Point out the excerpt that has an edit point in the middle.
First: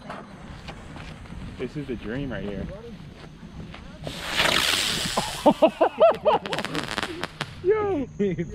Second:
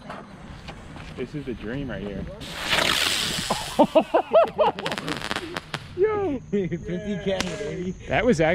second; 2 cuts; at 1.1 s, 2.4 s

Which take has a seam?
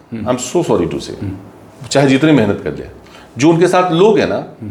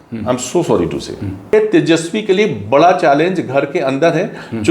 second; 1 cut; at 1.5 s

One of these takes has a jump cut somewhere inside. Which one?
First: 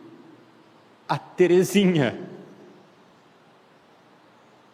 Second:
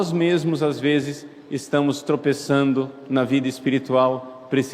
second; 1 cut; at 3.0 s

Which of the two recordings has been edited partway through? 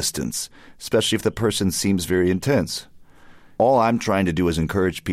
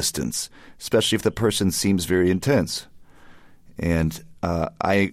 first; 1 cut; at 3.5 s

